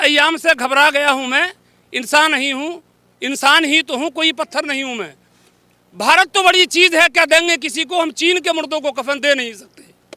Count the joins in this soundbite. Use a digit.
1